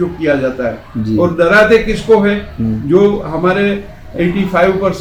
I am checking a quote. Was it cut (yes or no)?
no